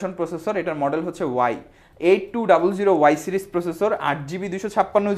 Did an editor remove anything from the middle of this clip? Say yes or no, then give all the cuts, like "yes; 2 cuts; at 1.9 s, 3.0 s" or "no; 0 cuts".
no; 0 cuts